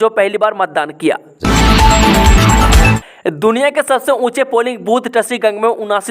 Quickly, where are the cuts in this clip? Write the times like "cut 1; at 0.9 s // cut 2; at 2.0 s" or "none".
cut 1; at 1.3 s // cut 2; at 3.1 s